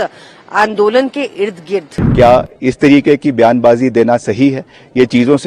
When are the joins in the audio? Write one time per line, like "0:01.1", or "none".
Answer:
0:02.0